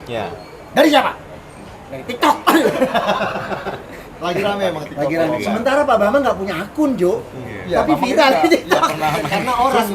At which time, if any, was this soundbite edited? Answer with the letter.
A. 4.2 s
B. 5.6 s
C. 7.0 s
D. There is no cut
D